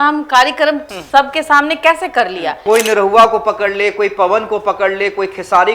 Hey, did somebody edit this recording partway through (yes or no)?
yes